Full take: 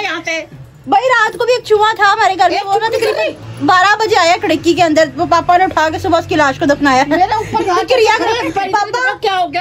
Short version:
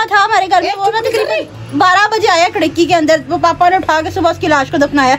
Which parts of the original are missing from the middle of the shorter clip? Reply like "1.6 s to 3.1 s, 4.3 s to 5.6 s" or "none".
none